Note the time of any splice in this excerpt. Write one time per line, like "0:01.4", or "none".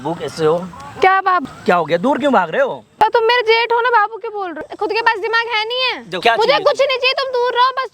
0:01.4
0:02.8
0:04.6
0:06.2